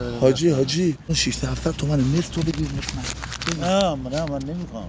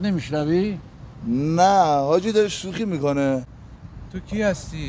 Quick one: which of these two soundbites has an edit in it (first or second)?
first